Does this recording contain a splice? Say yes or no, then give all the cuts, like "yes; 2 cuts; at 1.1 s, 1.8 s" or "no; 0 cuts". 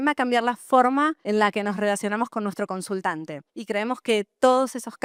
no; 0 cuts